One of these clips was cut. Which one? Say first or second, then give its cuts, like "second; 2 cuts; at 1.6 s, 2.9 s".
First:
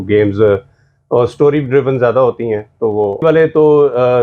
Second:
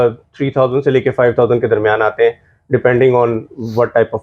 first; 1 cut; at 3.2 s